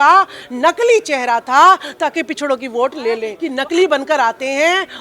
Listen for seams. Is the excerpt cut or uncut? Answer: cut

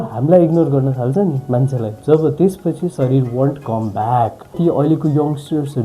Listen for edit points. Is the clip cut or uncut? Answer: cut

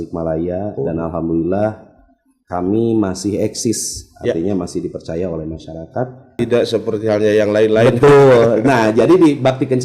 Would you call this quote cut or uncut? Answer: cut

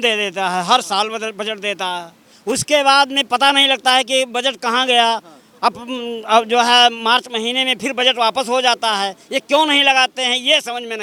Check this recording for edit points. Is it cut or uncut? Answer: uncut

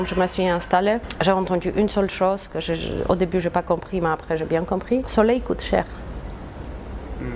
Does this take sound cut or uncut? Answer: cut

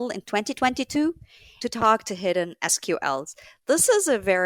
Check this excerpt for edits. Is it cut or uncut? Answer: uncut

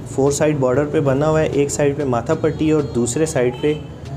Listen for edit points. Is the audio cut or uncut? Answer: uncut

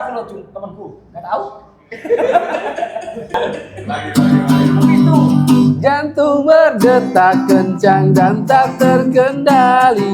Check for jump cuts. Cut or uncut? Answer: cut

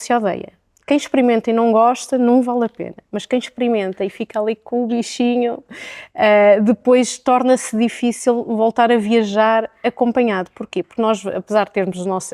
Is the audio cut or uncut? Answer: uncut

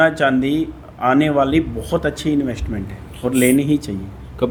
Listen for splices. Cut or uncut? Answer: uncut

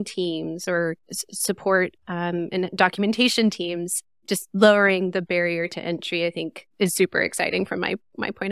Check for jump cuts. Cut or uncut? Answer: uncut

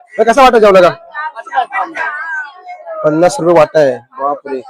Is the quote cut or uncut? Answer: uncut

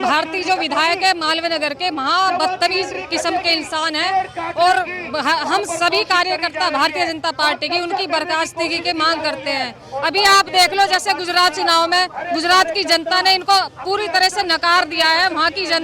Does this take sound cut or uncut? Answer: uncut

